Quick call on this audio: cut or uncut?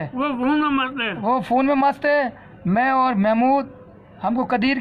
uncut